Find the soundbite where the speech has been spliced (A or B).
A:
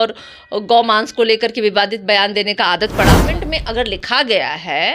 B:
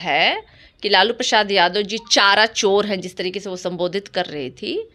A